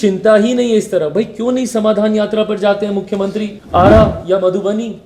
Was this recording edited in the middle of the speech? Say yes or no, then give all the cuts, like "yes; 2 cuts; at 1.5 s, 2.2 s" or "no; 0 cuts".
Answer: yes; 1 cut; at 3.6 s